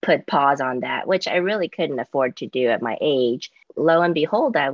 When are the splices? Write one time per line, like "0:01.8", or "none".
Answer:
0:03.7